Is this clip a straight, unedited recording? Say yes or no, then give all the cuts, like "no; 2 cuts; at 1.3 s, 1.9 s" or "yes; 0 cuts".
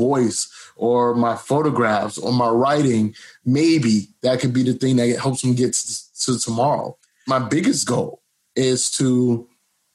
yes; 0 cuts